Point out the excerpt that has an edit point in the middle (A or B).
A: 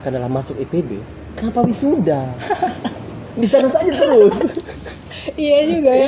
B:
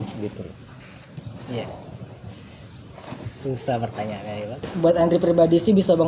B